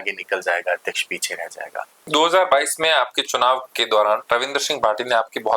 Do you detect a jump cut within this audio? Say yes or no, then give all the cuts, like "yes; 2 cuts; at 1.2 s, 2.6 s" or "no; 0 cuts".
yes; 2 cuts; at 2.0 s, 4.2 s